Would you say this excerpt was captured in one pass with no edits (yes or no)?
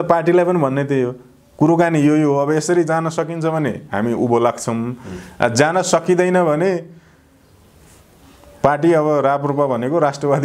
yes